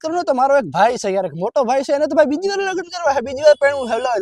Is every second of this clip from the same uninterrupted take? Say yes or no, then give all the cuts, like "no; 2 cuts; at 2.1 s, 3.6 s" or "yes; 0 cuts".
yes; 0 cuts